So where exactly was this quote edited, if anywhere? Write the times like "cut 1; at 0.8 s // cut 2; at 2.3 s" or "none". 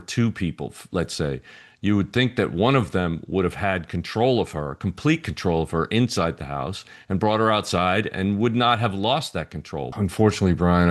cut 1; at 9.9 s